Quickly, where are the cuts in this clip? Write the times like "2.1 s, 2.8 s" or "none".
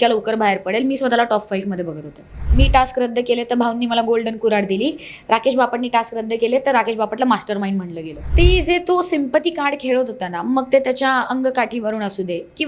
2.4 s, 8.3 s